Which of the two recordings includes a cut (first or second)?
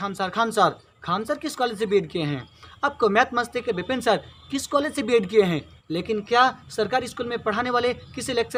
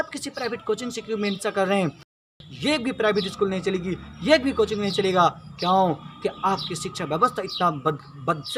second